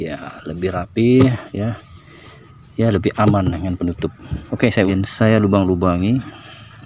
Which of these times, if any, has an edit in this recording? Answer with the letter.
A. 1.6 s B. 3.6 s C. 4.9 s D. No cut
C